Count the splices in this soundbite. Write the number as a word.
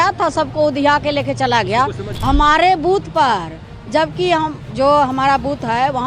one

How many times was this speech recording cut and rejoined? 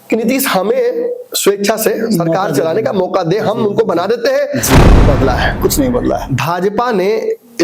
one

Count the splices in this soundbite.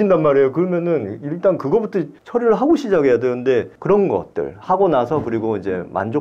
two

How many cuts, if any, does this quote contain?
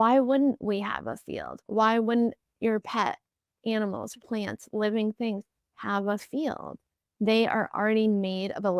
zero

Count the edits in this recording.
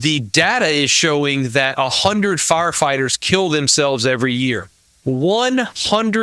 zero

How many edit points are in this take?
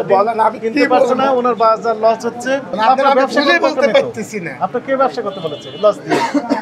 one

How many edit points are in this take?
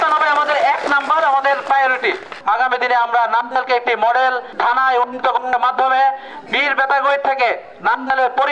two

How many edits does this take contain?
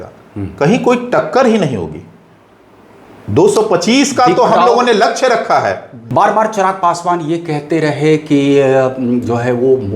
one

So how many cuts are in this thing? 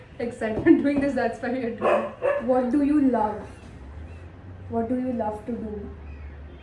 one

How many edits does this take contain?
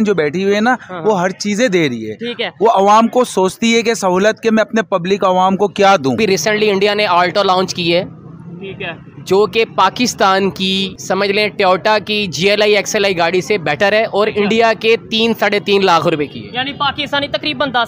two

